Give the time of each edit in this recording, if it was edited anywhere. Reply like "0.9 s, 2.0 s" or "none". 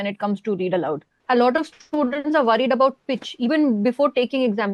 1.2 s